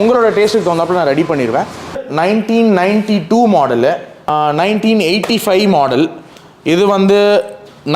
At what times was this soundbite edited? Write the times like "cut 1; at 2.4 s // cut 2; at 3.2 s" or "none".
cut 1; at 2.0 s // cut 2; at 4.3 s